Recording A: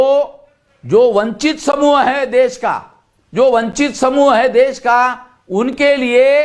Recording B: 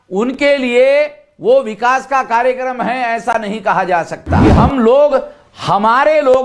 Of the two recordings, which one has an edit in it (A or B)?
B